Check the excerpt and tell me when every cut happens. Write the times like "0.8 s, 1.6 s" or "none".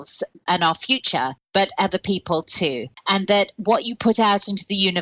1.4 s, 2.9 s